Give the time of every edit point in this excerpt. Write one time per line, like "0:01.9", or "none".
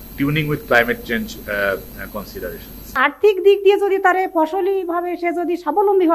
0:02.9